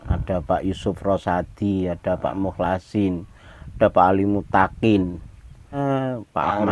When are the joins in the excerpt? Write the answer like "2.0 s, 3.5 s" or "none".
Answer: 5.8 s